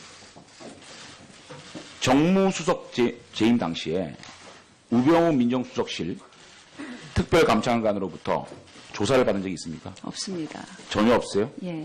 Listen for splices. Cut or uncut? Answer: cut